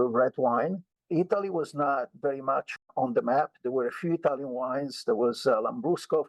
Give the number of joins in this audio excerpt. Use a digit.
2